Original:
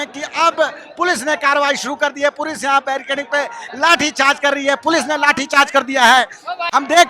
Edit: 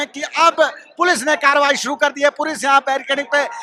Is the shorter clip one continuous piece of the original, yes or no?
yes